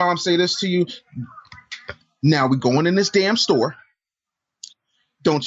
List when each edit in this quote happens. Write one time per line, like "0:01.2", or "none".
none